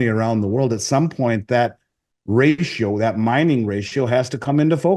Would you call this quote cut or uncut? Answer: uncut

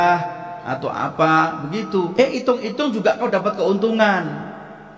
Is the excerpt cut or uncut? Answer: cut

